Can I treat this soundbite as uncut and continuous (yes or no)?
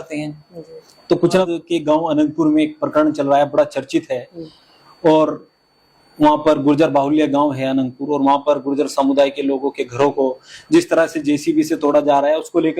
no